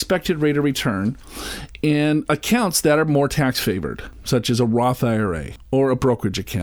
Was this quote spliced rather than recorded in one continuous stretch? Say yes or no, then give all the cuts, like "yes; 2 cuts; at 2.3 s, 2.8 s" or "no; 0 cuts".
no; 0 cuts